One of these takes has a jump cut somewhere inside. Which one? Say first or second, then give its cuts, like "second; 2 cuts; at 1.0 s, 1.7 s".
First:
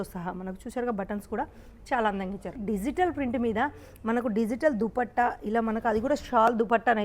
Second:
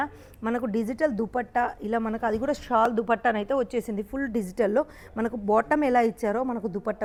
first; 1 cut; at 2.6 s